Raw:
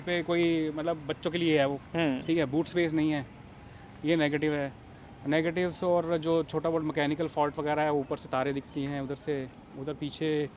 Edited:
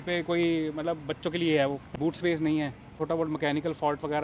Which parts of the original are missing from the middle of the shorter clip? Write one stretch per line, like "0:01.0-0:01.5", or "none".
0:01.9-0:02.5
0:03.5-0:06.5